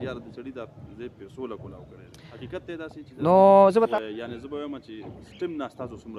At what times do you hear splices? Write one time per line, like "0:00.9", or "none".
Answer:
0:03.9

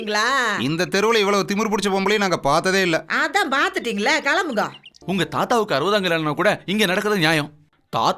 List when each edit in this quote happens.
0:04.9

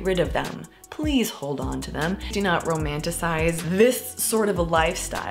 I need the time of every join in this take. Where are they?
0:02.3
0:03.6

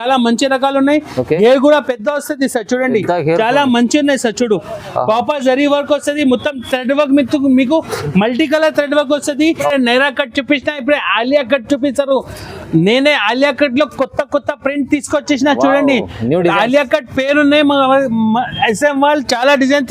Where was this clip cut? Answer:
0:09.4

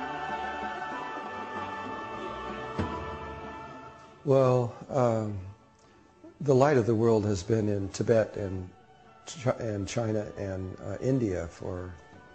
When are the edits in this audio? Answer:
none

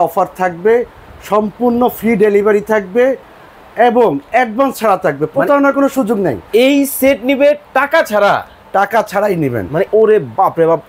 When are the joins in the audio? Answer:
0:09.9

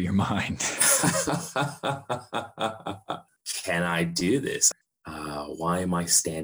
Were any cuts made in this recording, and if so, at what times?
0:03.2
0:04.7

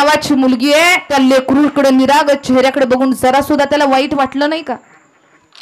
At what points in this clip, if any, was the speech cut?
0:01.1

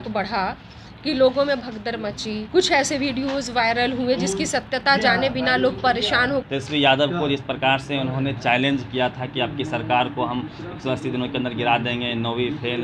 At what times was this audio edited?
0:02.4
0:06.5

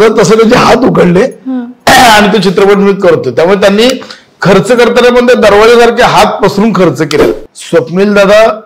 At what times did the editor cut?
0:07.3

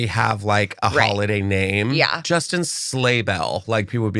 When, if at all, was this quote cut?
0:02.2

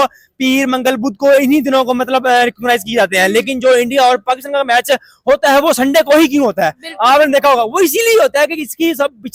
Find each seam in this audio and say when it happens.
none

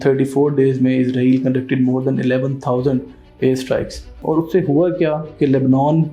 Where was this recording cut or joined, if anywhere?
0:04.1

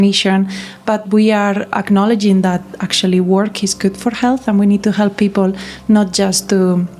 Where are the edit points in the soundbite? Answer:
none

